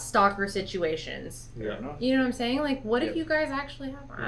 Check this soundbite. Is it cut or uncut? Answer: uncut